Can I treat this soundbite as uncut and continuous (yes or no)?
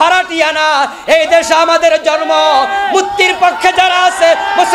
yes